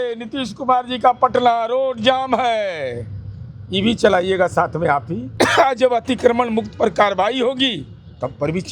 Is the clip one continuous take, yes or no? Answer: no